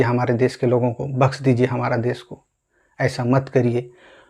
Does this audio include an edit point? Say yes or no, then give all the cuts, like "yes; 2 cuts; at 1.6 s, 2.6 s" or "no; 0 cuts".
no; 0 cuts